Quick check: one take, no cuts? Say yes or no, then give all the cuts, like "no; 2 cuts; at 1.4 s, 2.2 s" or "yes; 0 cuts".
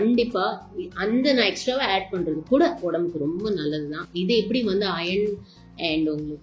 yes; 0 cuts